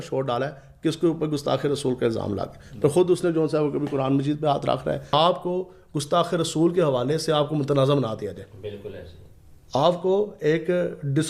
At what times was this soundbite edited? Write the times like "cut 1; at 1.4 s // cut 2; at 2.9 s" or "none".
cut 1; at 5.1 s